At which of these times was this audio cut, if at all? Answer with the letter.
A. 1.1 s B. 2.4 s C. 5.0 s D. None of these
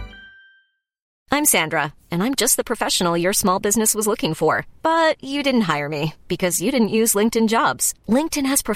A